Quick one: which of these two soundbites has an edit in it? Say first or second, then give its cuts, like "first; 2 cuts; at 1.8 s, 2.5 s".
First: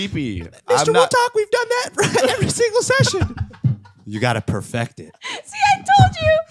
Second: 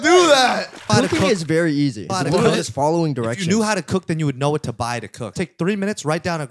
second; 3 cuts; at 0.9 s, 2.1 s, 5.3 s